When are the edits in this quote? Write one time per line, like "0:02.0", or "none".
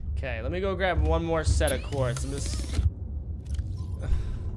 none